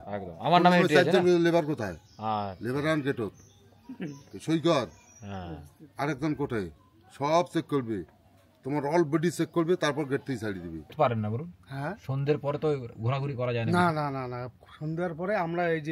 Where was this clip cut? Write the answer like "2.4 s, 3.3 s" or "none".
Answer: 10.9 s